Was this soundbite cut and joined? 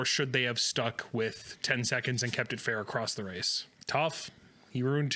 yes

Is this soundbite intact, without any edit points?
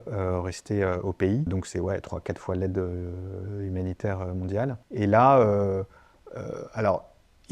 no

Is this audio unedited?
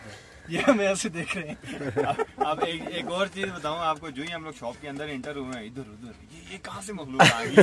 yes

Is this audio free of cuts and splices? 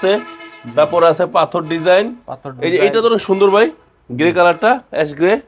yes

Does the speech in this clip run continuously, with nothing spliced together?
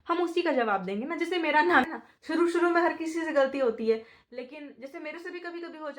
no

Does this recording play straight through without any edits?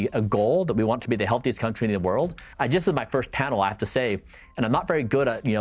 no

